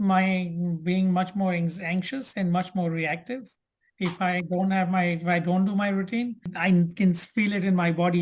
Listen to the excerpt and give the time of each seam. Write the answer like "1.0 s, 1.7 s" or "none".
6.5 s